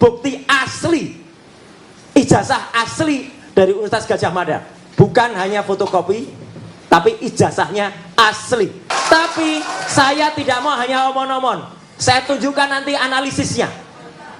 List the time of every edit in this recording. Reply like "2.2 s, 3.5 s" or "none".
8.8 s